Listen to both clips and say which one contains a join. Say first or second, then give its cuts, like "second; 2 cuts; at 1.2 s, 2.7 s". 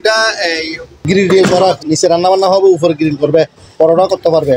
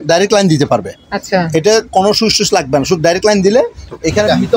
first; 1 cut; at 1.0 s